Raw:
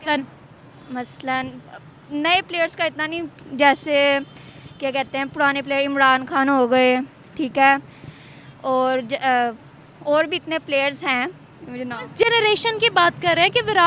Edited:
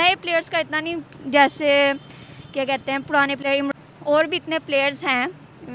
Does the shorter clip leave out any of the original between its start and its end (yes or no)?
yes